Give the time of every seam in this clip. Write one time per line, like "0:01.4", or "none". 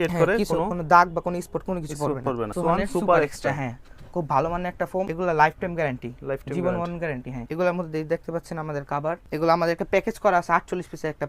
0:02.5
0:05.1
0:07.4
0:09.2